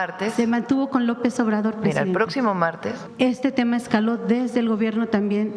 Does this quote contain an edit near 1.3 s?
no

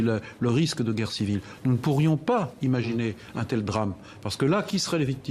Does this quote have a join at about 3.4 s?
no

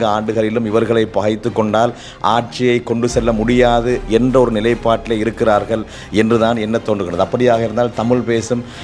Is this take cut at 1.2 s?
no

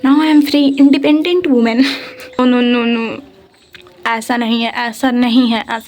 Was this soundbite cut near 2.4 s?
yes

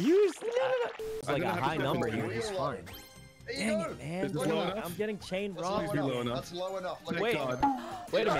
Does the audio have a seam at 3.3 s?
no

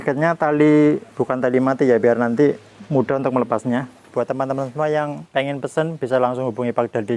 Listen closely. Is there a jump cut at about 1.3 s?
no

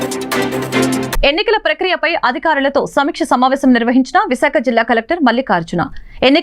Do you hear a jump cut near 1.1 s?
yes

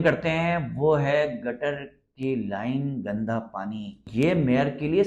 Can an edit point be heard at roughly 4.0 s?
yes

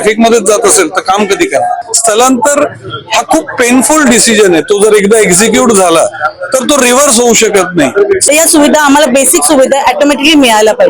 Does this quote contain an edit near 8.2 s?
yes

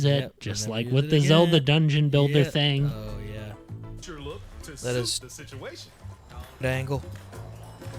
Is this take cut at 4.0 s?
yes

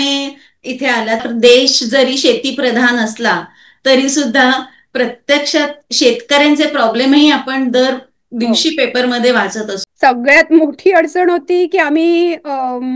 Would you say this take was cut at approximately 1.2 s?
yes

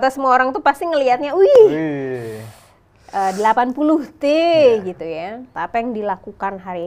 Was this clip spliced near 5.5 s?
yes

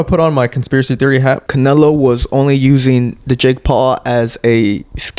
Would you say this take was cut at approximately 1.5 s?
yes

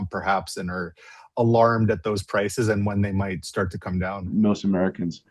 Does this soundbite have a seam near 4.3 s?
yes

